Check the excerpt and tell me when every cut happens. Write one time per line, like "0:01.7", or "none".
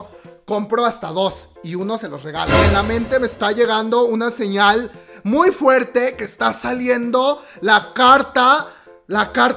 0:02.6